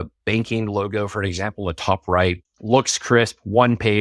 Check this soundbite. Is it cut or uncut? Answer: cut